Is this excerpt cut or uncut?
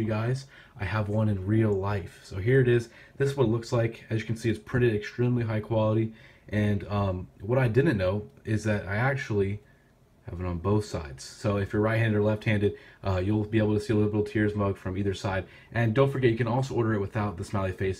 cut